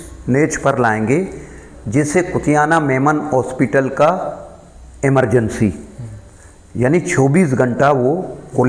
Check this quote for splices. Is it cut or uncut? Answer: uncut